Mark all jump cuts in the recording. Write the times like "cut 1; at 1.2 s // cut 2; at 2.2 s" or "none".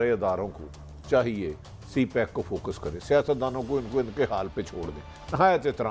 none